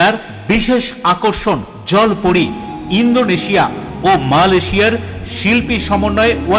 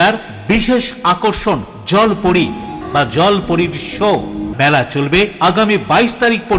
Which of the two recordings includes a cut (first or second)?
second